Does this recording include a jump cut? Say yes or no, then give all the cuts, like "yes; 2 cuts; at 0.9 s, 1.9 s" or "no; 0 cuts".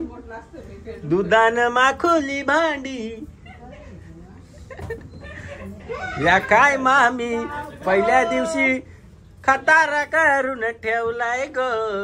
no; 0 cuts